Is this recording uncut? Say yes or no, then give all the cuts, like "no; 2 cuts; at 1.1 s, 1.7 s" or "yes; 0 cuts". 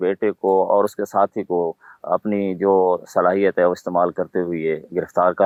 yes; 0 cuts